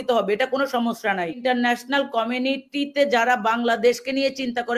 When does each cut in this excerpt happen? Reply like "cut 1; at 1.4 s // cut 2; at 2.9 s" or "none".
cut 1; at 1.4 s